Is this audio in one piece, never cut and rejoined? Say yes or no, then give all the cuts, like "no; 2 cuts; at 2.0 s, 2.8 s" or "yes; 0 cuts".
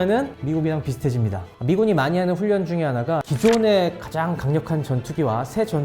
no; 2 cuts; at 1.4 s, 3.3 s